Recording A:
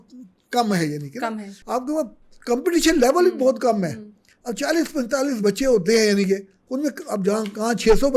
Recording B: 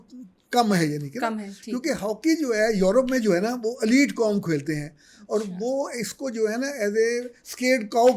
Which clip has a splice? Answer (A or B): A